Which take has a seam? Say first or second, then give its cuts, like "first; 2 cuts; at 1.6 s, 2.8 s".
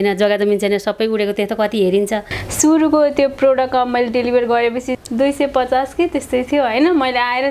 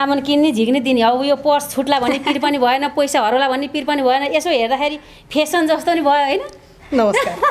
first; 2 cuts; at 2.4 s, 4.9 s